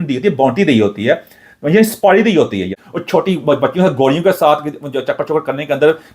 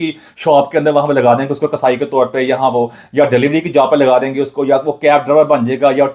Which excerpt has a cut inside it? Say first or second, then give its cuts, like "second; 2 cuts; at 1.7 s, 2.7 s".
first; 1 cut; at 2.8 s